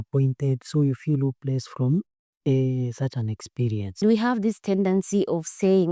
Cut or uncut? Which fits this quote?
cut